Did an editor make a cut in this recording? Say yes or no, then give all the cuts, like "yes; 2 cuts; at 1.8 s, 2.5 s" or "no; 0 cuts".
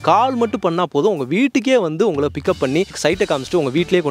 yes; 1 cut; at 2.9 s